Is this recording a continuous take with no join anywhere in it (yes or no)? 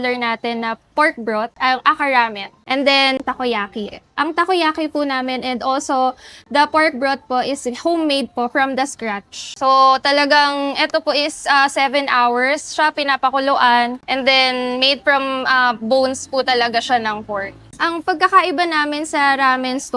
yes